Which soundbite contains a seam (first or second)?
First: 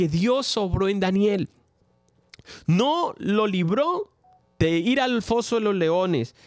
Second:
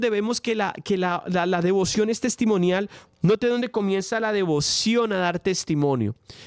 second